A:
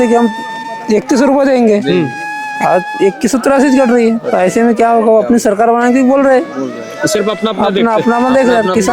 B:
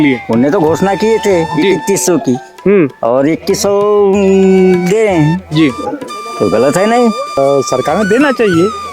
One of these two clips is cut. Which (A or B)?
B